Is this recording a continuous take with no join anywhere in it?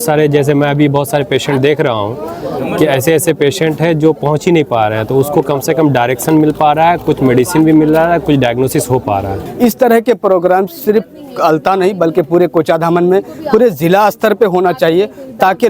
no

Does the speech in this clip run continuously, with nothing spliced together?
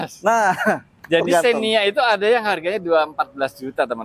yes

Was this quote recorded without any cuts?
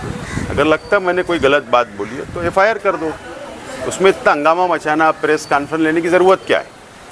yes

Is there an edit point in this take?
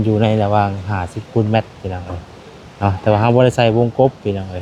no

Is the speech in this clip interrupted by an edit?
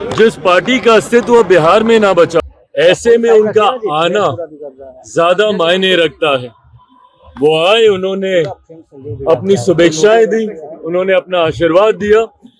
yes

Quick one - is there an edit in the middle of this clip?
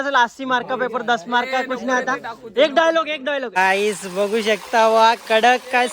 yes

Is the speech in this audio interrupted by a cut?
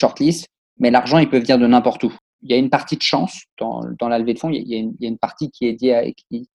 yes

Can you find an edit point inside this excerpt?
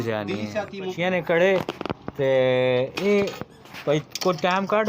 yes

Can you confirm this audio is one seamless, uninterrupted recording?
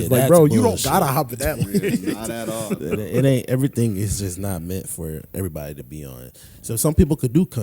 yes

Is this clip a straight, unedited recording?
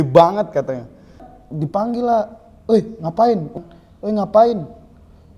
no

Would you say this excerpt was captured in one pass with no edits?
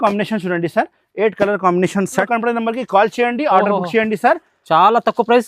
no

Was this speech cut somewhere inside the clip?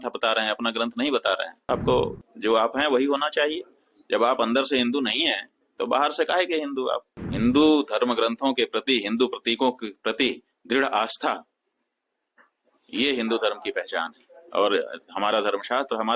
yes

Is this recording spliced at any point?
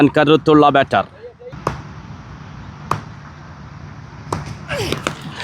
yes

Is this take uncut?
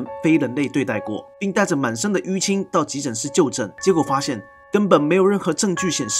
no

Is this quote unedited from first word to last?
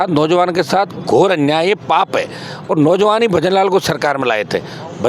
yes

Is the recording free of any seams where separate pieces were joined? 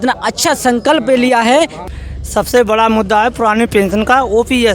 no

